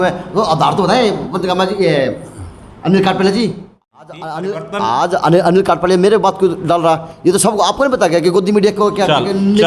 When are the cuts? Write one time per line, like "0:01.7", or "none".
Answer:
0:03.7